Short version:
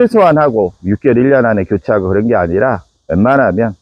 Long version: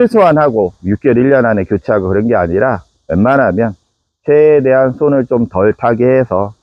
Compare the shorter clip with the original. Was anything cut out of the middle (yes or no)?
no